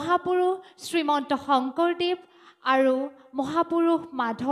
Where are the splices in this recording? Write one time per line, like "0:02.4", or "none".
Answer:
none